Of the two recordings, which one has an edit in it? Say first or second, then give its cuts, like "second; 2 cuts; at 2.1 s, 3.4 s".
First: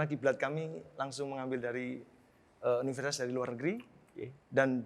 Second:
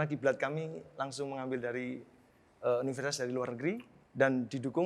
second; 1 cut; at 4.0 s